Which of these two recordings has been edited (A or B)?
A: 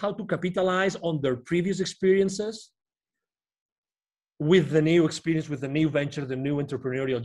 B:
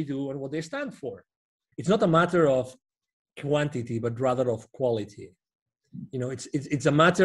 B